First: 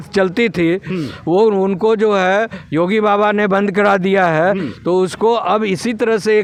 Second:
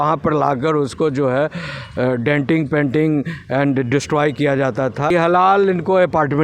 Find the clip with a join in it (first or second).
second